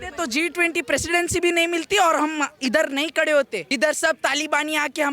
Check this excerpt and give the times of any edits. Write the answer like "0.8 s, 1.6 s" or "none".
3.6 s